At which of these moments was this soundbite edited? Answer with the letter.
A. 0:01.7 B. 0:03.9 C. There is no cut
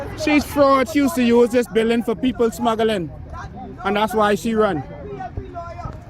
B